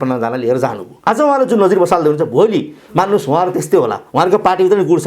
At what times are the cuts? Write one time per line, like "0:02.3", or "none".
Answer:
0:01.1